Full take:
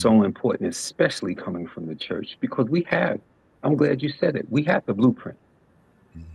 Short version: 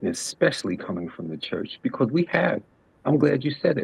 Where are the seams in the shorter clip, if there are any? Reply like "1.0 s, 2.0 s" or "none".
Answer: none